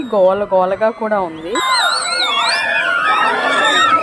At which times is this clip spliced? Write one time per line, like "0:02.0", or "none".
none